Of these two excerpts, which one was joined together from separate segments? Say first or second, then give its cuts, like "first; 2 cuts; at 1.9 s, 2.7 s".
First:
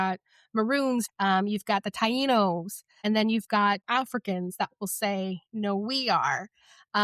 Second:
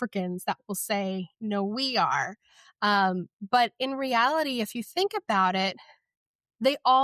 first; 2 cuts; at 1.1 s, 2.9 s